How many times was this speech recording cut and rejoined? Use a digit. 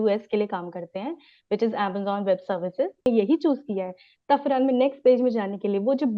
1